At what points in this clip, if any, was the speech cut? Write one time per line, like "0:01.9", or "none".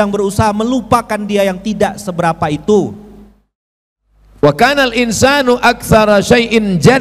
0:03.5